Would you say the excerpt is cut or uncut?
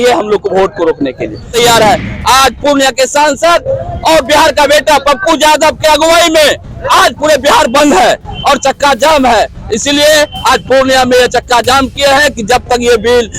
cut